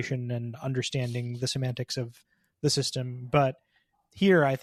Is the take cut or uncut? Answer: uncut